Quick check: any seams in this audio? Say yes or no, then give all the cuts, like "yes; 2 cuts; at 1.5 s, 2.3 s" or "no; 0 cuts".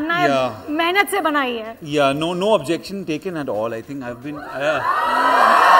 no; 0 cuts